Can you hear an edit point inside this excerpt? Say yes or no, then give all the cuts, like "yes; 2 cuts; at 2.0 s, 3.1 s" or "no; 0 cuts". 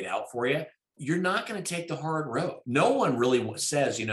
yes; 2 cuts; at 0.9 s, 2.6 s